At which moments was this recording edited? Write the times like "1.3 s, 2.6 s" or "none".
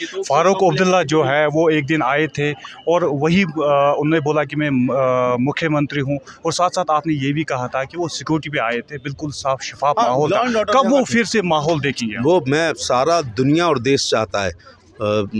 none

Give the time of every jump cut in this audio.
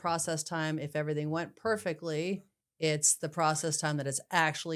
none

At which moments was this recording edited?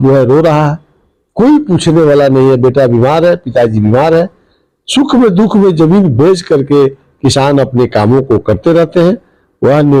none

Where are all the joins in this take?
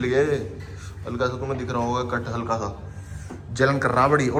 none

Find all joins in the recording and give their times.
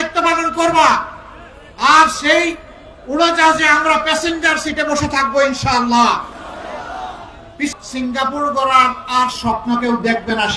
7.7 s

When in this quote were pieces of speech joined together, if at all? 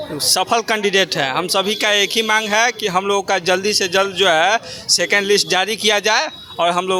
none

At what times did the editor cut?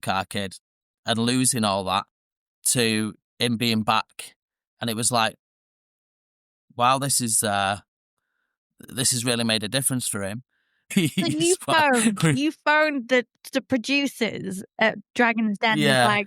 10.9 s

